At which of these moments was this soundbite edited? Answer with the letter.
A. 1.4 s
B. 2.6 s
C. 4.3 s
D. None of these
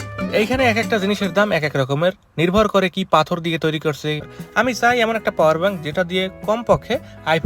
C